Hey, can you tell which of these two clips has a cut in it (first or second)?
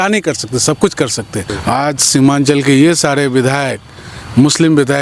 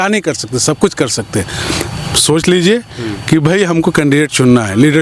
first